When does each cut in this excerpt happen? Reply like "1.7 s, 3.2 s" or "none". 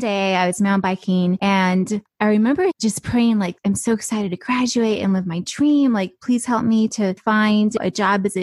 2.0 s